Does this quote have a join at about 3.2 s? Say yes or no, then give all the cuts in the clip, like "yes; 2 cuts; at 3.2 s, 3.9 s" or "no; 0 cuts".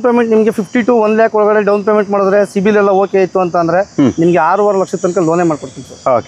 no; 0 cuts